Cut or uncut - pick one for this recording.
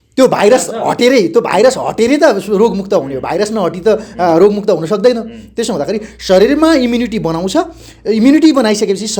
uncut